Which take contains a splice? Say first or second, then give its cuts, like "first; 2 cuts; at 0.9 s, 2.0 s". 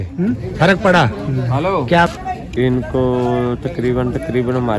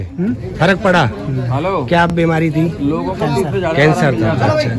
first; 1 cut; at 2.1 s